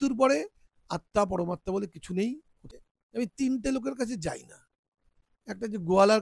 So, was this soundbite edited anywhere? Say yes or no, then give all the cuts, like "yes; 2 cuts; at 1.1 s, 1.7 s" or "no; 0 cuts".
yes; 1 cut; at 2.6 s